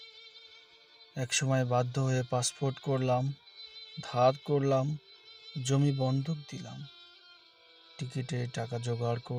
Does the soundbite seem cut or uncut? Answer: uncut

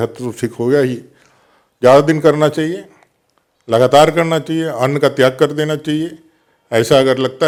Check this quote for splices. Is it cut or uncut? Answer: uncut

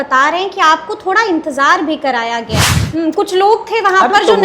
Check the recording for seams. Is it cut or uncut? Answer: cut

